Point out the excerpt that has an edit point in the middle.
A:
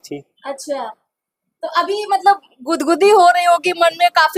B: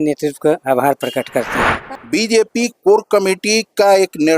B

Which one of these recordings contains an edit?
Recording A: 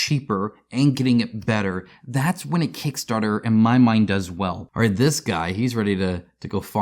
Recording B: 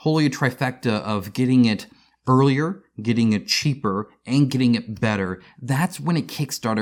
A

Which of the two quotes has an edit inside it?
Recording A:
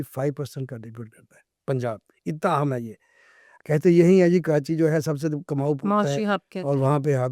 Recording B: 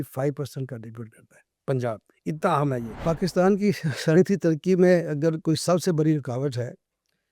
B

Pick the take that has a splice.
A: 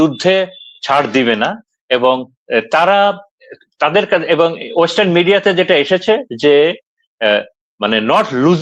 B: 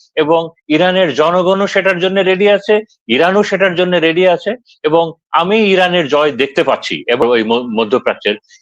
B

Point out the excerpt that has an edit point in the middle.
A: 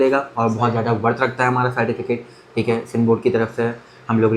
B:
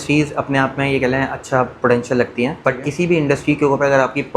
B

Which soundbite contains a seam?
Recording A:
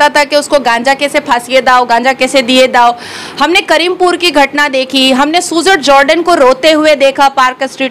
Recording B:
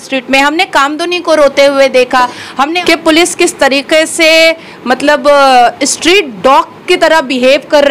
B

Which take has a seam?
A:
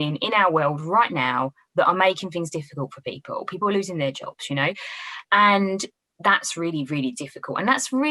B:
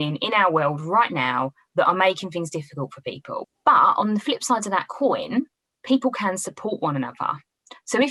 B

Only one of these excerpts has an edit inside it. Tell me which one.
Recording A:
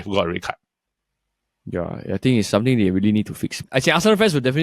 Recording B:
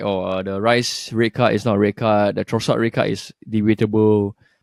A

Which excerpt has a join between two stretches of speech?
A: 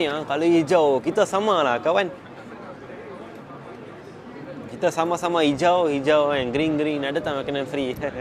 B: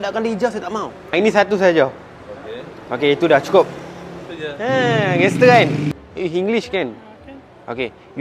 B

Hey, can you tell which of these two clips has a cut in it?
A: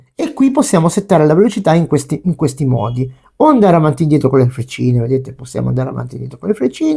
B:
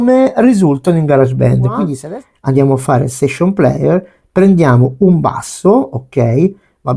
B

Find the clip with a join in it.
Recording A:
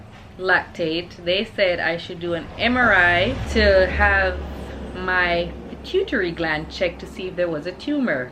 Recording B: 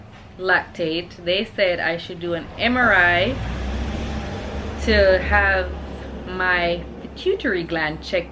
A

